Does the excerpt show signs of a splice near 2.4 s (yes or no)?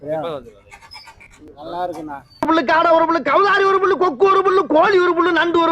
yes